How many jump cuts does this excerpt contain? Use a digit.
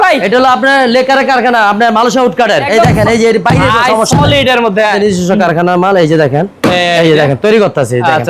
2